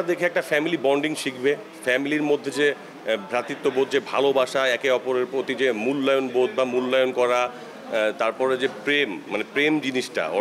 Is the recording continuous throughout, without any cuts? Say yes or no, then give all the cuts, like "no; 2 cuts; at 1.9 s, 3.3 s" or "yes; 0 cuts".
yes; 0 cuts